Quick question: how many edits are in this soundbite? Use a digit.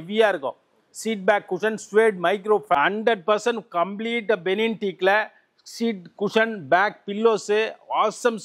1